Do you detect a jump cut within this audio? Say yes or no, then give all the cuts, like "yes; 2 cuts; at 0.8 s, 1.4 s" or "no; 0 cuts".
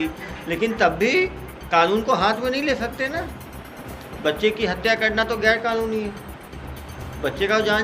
no; 0 cuts